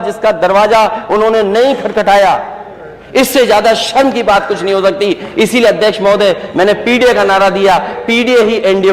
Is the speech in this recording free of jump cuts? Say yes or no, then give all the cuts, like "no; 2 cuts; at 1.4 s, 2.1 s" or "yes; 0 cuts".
yes; 0 cuts